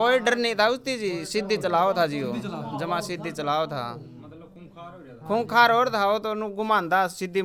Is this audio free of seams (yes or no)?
yes